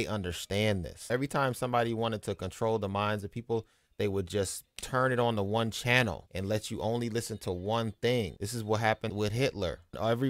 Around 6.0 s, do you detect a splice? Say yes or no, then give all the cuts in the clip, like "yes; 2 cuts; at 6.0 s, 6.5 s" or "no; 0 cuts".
no; 1 cut; at 1.0 s